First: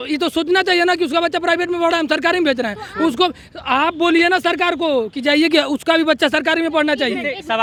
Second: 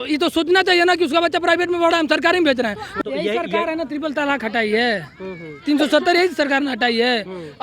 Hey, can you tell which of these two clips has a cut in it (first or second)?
second